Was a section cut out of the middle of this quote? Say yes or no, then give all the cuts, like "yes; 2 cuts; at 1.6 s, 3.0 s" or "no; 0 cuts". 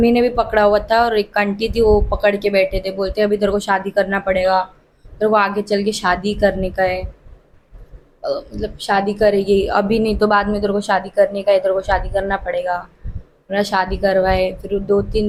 no; 0 cuts